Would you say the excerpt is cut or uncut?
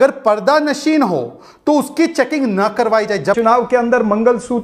cut